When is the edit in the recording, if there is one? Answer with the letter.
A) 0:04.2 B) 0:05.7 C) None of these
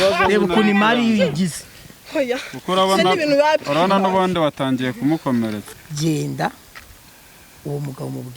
B